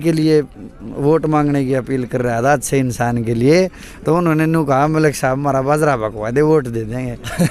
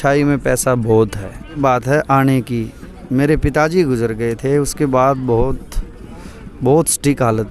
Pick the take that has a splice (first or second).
second